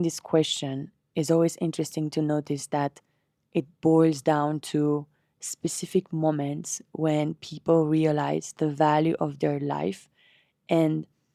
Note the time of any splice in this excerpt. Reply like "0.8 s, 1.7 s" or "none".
none